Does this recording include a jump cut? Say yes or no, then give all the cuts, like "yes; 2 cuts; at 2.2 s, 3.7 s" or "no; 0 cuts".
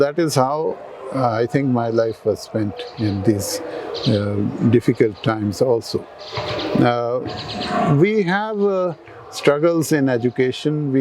no; 0 cuts